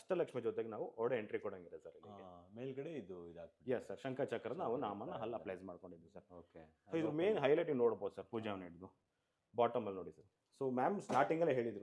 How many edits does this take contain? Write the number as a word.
zero